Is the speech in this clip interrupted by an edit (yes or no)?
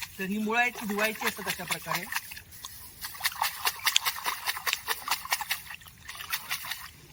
no